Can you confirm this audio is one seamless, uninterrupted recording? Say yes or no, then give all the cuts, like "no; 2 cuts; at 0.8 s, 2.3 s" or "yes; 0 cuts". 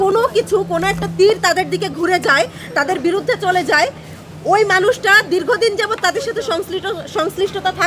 yes; 0 cuts